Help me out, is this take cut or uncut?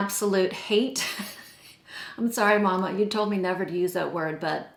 uncut